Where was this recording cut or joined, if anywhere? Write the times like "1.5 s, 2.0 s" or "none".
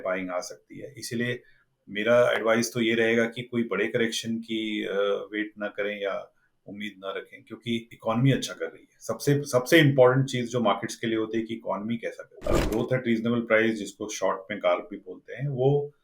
7.9 s, 12.3 s